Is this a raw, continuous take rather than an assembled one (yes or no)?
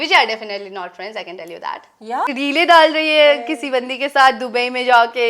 no